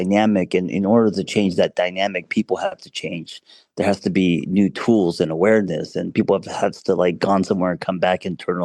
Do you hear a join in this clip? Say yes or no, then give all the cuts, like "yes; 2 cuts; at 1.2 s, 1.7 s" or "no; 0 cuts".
no; 0 cuts